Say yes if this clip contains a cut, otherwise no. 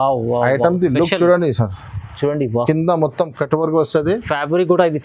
no